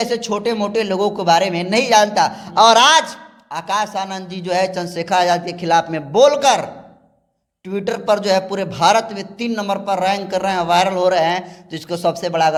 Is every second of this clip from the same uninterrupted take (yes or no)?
yes